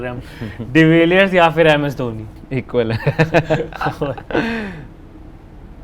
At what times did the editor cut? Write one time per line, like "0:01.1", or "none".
none

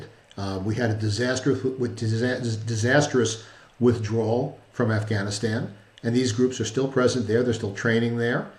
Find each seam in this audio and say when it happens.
none

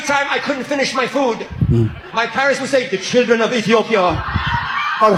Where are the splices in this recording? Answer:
none

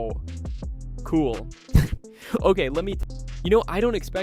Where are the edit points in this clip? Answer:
0:03.0

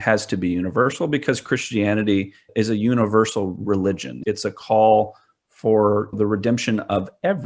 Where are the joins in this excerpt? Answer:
none

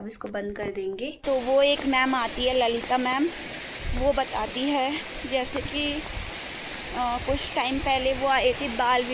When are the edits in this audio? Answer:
0:01.2

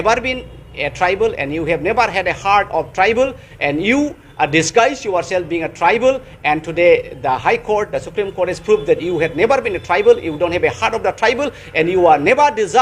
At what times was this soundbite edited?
none

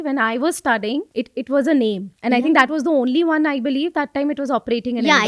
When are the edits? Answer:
0:01.1
0:02.1

